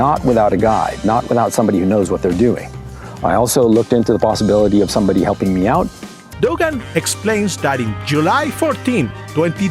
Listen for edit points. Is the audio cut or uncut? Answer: cut